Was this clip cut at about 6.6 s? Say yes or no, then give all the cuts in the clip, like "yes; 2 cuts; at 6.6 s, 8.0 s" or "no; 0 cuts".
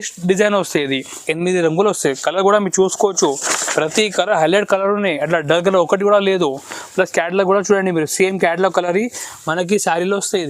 no; 1 cut; at 1.2 s